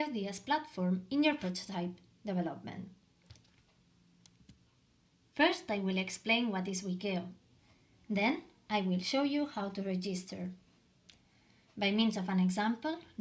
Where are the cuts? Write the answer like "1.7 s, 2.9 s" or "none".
none